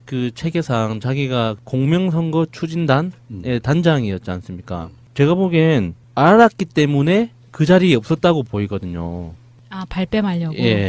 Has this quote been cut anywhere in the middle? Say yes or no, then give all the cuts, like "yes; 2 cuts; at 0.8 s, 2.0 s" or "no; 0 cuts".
yes; 1 cut; at 9.0 s